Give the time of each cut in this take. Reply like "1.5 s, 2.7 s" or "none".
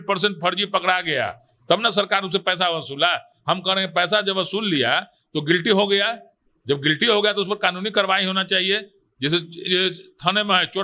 none